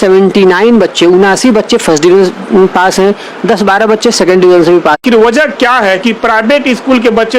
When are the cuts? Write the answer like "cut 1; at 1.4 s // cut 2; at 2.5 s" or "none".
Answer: cut 1; at 5.0 s